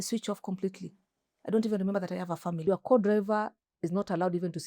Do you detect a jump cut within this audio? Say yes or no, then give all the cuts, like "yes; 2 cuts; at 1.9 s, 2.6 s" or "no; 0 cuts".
yes; 1 cut; at 2.7 s